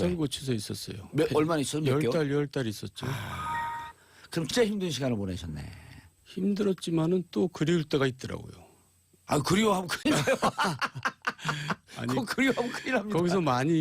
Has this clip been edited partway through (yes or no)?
yes